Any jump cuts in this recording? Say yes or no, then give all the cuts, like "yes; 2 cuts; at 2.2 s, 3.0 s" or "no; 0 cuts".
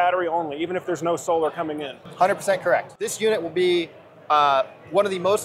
yes; 1 cut; at 2.9 s